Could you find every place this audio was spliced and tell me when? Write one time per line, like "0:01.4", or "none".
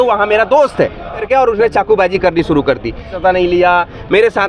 0:01.2
0:03.1